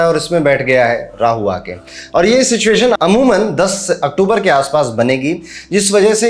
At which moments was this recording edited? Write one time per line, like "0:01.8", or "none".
none